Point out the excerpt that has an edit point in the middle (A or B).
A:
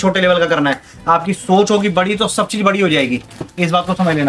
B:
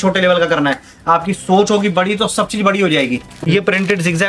B